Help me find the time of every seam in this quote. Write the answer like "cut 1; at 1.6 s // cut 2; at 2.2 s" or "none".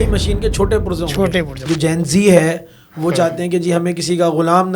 cut 1; at 1.6 s